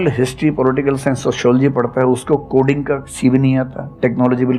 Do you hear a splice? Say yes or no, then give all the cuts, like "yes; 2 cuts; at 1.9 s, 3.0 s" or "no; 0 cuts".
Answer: no; 0 cuts